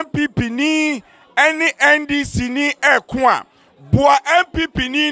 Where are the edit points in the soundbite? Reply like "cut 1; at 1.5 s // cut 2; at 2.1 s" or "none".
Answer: none